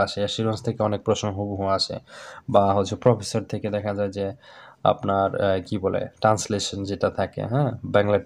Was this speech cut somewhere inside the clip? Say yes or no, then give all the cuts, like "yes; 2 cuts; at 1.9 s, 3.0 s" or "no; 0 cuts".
no; 0 cuts